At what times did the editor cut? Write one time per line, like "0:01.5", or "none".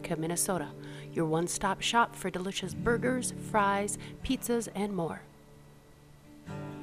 0:05.2